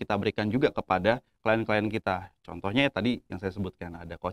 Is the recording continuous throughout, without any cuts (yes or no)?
yes